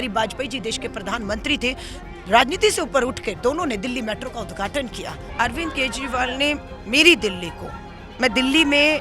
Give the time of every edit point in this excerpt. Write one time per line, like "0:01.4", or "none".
0:05.2